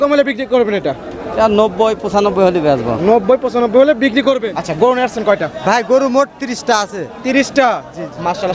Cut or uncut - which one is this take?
cut